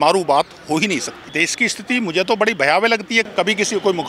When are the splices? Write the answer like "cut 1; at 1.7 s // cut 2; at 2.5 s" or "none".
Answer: cut 1; at 1.3 s // cut 2; at 3.2 s